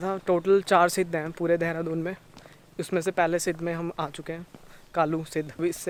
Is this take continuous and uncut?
yes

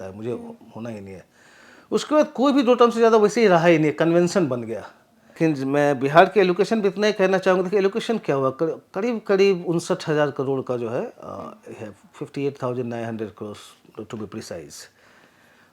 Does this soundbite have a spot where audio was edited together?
yes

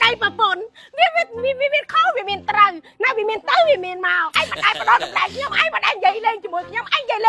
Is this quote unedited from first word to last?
no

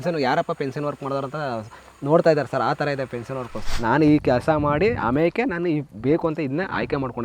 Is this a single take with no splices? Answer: no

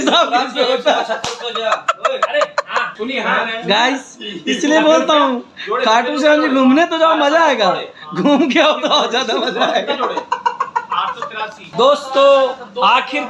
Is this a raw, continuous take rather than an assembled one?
no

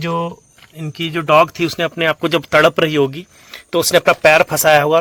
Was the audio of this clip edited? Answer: no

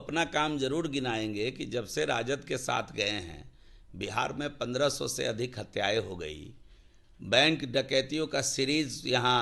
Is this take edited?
no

